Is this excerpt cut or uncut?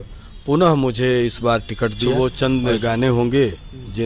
cut